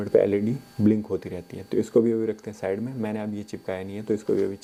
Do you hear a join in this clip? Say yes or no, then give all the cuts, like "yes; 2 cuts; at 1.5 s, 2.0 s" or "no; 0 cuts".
no; 0 cuts